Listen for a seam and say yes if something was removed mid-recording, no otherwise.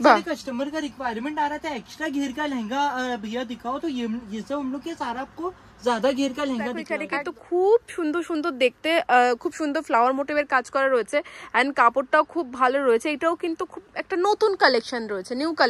yes